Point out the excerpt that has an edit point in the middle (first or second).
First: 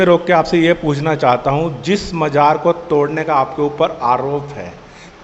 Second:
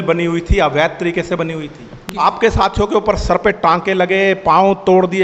second